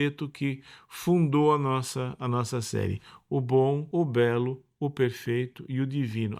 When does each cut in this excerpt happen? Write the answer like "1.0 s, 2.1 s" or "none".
3.8 s